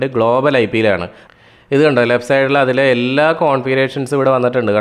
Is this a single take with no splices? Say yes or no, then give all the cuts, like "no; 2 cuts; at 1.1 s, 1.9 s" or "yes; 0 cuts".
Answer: no; 1 cut; at 1.2 s